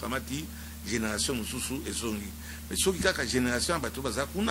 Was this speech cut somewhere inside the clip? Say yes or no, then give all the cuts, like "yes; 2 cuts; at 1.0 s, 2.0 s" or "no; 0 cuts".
no; 0 cuts